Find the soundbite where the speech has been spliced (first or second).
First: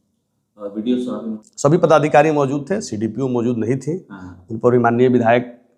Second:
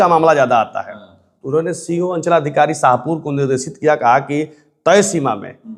first